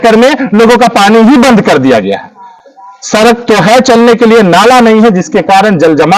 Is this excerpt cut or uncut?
uncut